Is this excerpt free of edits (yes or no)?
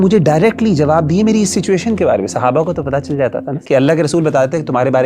no